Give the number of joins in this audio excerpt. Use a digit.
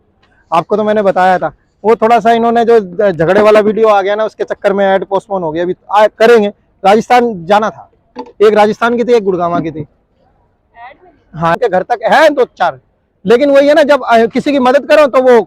1